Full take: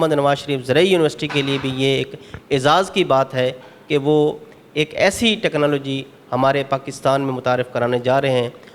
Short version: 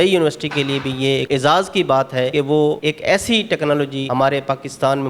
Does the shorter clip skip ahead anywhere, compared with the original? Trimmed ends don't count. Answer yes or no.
yes